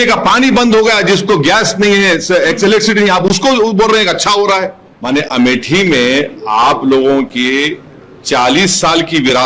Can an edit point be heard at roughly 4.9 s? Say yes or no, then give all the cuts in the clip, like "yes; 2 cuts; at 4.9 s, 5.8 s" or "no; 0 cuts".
yes; 1 cut; at 4.9 s